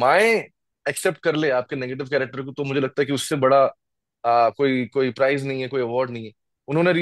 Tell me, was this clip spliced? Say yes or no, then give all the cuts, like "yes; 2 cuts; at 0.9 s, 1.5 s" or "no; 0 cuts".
no; 0 cuts